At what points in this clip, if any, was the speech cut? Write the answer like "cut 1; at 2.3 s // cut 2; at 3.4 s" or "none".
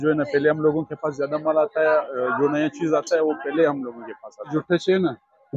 cut 1; at 4.5 s